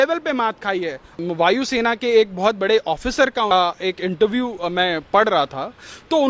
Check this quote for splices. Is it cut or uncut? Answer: cut